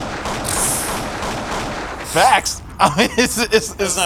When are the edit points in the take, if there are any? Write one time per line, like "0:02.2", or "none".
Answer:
none